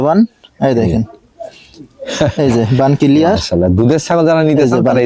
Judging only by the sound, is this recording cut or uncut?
uncut